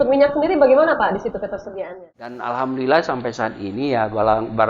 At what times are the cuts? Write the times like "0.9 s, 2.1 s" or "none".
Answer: 1.6 s